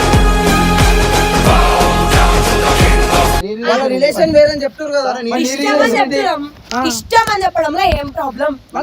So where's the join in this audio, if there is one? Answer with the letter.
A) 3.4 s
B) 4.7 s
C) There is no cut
A